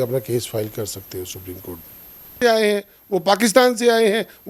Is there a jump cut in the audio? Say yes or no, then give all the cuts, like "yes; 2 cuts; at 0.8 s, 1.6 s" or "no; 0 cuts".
yes; 1 cut; at 2.4 s